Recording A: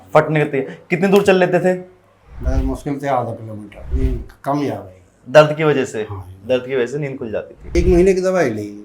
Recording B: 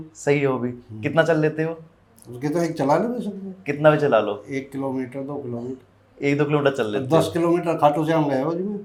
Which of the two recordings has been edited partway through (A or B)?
A